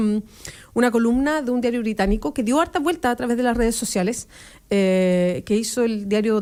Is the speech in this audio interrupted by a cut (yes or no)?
no